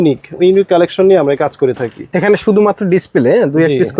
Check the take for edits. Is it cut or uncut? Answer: uncut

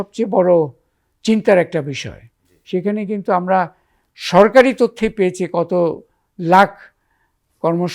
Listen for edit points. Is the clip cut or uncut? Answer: uncut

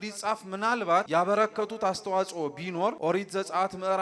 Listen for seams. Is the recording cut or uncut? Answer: cut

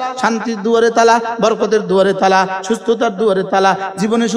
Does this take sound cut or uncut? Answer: uncut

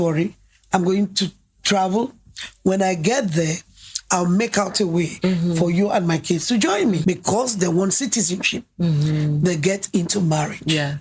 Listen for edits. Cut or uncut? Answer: cut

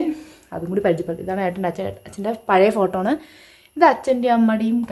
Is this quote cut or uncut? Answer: uncut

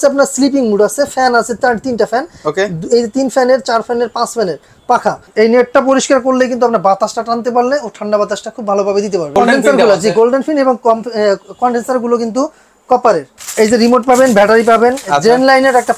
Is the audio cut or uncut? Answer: cut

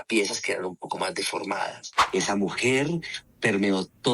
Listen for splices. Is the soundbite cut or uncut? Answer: cut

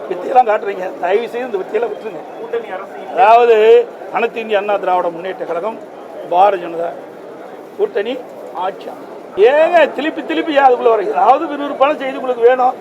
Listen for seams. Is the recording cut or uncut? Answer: cut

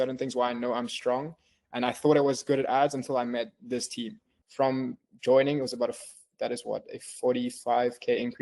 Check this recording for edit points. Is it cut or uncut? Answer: cut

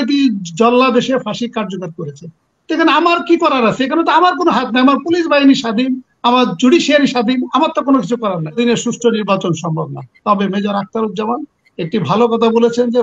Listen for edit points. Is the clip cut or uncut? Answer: cut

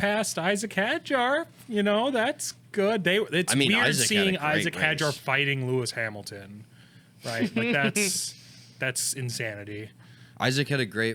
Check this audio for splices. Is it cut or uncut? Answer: uncut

